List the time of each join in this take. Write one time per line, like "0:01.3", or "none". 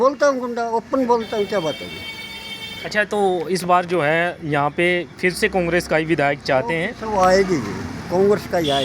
none